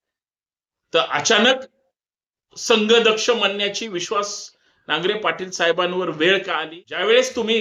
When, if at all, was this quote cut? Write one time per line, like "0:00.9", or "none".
0:06.6

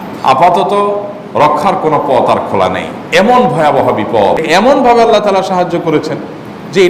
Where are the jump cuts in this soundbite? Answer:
0:04.4

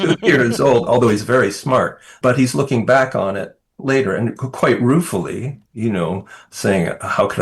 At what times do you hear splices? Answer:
0:02.0

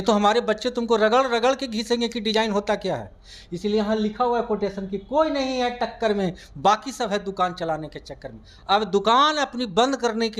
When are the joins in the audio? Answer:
none

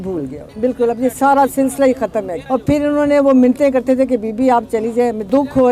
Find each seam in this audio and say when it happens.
none

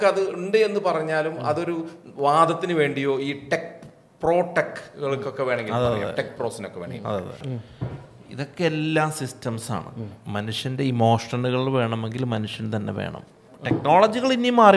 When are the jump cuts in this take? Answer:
0:07.4
0:13.5

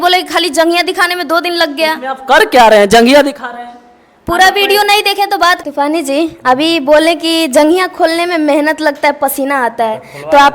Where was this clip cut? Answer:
0:05.6

